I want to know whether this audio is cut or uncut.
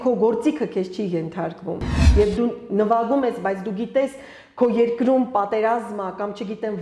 cut